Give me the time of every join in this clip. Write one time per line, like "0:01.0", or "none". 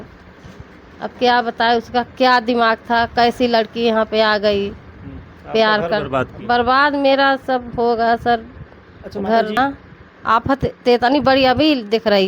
0:09.5